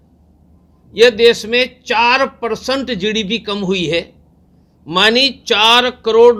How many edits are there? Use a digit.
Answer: 0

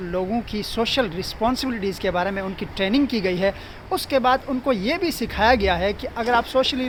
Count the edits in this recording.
0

